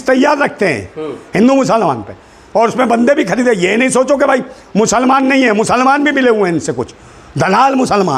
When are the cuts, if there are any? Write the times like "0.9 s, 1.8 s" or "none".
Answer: none